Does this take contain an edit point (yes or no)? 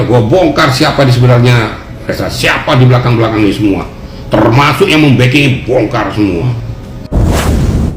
yes